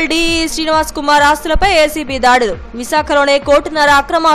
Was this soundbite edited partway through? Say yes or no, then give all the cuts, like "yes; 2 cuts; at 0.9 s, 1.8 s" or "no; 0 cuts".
no; 0 cuts